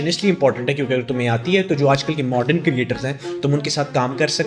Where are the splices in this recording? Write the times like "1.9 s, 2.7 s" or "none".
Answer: none